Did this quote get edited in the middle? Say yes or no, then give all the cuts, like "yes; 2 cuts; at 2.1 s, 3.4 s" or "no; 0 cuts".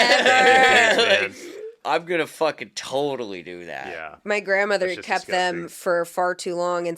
yes; 2 cuts; at 1.8 s, 4.1 s